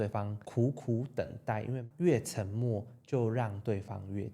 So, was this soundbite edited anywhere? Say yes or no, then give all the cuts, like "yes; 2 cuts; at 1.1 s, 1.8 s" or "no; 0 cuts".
yes; 1 cut; at 1.8 s